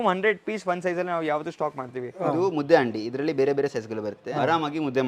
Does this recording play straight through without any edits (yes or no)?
no